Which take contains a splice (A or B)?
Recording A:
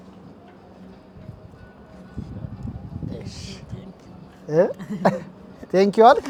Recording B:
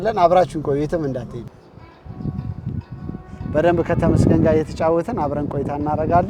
B